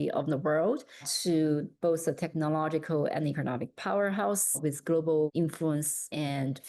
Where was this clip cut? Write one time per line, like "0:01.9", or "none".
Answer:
0:05.6